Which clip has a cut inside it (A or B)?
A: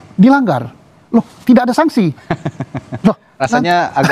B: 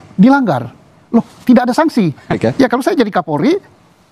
B